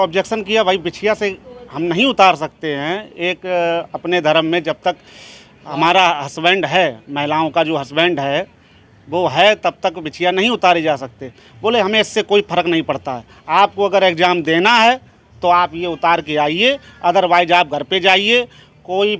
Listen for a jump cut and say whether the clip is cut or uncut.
uncut